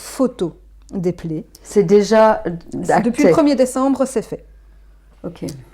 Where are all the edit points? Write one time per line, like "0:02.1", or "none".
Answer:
none